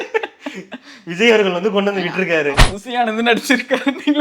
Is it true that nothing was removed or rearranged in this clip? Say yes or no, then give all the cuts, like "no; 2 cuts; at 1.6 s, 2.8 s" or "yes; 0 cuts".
no; 1 cut; at 2.6 s